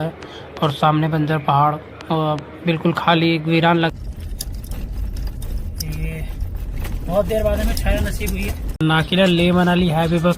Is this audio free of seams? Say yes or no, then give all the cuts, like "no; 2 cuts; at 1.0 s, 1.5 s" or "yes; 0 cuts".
no; 2 cuts; at 3.9 s, 8.8 s